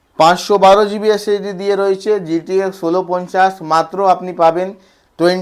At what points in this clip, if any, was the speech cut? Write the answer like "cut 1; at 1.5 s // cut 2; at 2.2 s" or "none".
none